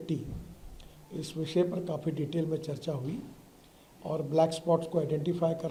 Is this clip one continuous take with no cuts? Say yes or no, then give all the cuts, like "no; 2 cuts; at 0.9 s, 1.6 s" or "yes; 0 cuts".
yes; 0 cuts